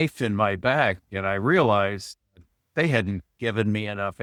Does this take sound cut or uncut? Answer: uncut